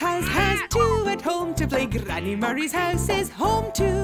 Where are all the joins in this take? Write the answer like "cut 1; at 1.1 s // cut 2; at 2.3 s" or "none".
none